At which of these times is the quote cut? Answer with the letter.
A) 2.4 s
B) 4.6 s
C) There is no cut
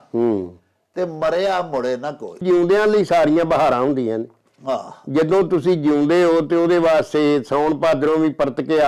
A